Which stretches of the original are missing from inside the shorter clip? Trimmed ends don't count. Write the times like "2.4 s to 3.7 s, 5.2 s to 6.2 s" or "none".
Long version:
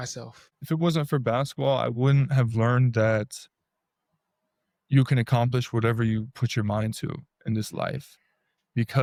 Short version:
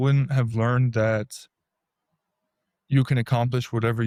none